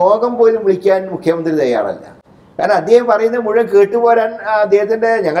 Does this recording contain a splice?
no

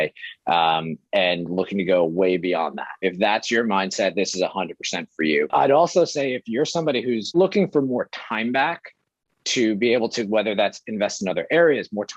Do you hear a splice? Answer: yes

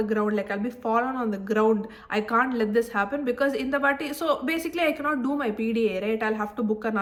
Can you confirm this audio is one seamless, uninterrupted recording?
yes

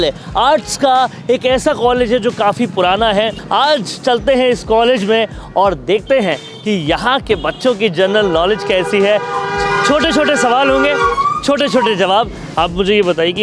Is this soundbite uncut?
no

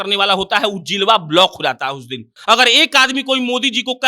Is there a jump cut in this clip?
yes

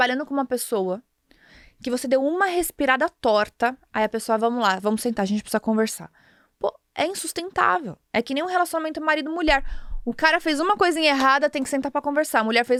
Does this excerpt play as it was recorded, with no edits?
yes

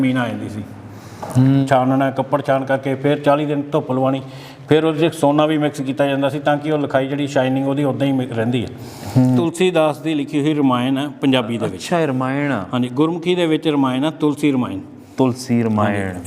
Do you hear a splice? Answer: yes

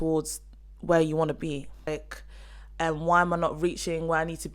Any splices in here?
yes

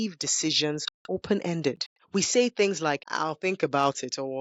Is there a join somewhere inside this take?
yes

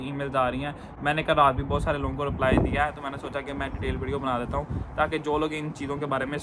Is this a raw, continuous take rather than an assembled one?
yes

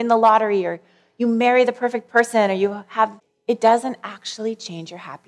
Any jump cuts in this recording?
yes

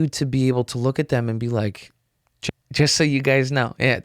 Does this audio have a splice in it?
yes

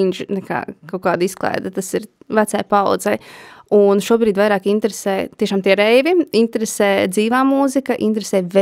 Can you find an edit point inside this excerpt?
no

